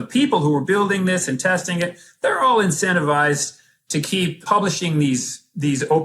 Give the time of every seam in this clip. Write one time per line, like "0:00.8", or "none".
0:04.4